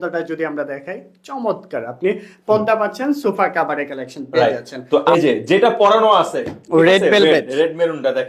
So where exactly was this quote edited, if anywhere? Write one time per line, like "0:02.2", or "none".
0:05.0